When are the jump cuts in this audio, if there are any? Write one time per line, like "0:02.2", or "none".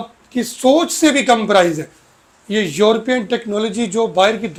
none